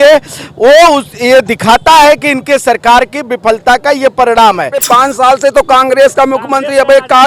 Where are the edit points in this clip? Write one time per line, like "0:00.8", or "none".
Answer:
0:04.8